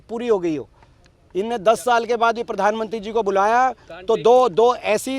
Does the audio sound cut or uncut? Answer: uncut